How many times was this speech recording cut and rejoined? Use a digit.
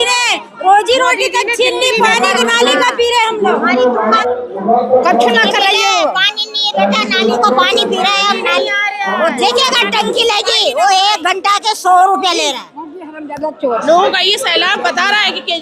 2